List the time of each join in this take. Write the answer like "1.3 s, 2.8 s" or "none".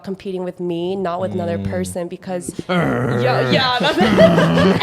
none